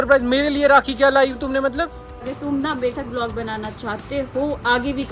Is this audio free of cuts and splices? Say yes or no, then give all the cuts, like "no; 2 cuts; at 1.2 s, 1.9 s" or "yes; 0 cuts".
no; 1 cut; at 2.2 s